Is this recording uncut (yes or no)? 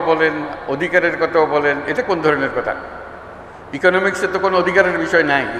yes